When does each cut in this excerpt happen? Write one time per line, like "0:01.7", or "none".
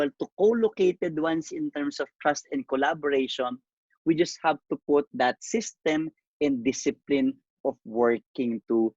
none